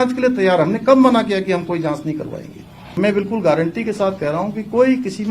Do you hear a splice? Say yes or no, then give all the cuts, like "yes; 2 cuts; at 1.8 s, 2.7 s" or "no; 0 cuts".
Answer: yes; 1 cut; at 3.0 s